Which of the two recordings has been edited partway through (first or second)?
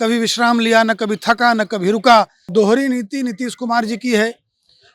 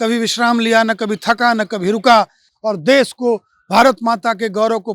first